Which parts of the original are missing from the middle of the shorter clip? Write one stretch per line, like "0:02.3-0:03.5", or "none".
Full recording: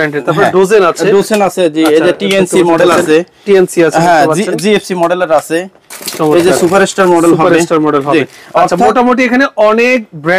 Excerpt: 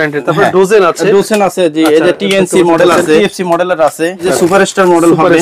0:03.2-0:04.7
0:05.8-0:06.5